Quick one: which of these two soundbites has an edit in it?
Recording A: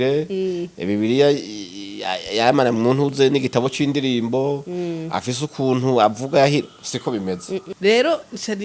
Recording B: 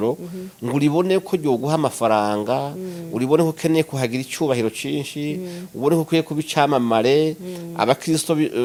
A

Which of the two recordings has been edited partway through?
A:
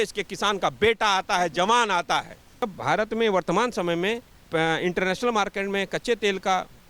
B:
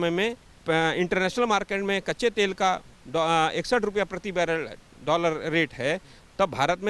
A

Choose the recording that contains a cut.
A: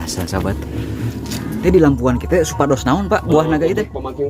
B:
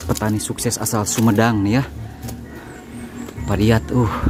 A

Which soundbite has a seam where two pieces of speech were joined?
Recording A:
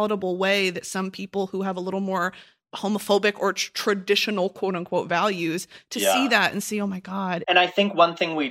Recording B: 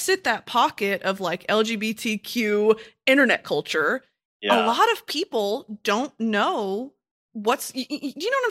A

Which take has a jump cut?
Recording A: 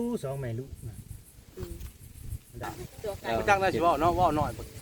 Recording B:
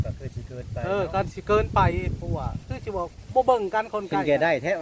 A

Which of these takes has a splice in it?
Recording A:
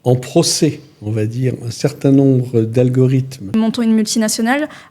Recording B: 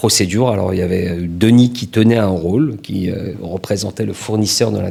A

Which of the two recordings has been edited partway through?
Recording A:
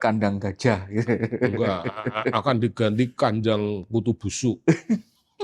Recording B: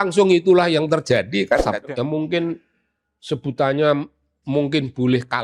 B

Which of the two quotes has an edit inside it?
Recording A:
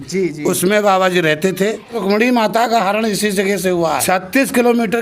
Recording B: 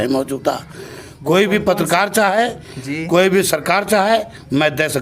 A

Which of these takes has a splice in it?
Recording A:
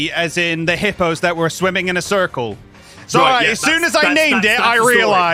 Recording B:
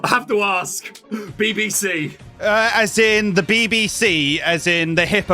B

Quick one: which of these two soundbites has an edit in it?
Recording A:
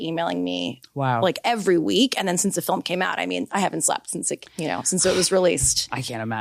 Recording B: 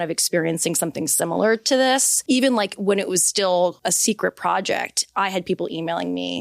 B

